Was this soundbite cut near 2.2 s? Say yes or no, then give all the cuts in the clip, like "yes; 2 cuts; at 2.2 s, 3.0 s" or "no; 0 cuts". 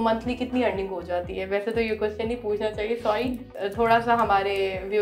no; 1 cut; at 3.5 s